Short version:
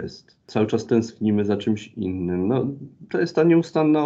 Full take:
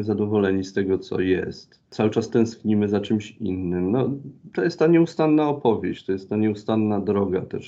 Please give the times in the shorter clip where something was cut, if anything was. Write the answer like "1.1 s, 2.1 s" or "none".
none